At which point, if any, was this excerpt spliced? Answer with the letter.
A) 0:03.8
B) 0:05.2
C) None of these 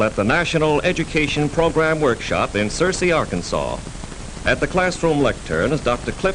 B